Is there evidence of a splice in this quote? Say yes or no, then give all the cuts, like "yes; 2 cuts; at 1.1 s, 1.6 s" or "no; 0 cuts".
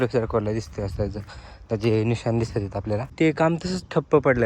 yes; 1 cut; at 3.1 s